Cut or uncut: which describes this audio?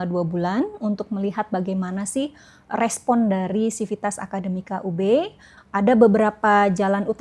cut